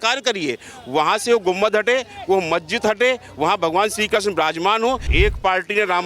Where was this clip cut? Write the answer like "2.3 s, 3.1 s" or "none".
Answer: 5.1 s